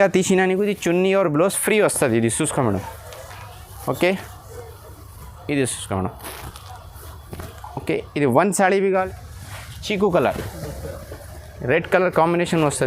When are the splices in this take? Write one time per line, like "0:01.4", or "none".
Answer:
0:09.1